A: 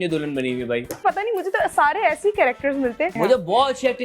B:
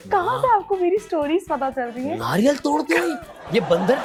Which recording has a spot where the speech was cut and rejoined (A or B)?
A